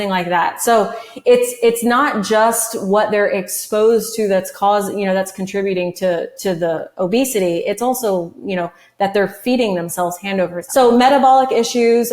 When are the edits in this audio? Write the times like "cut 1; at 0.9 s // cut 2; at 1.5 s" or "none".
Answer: cut 1; at 10.6 s